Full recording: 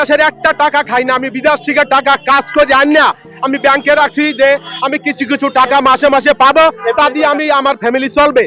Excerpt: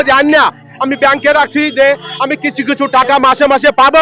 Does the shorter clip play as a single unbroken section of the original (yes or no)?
yes